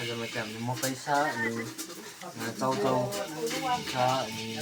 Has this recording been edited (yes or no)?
no